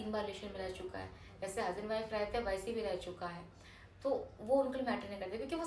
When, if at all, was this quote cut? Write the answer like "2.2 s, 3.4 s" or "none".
none